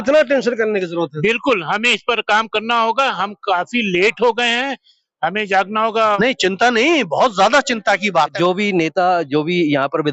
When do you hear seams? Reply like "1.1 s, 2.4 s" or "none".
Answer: 6.0 s, 8.2 s